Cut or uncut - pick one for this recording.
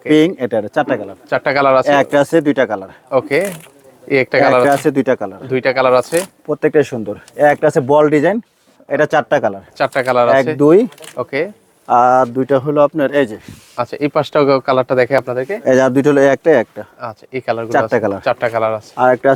uncut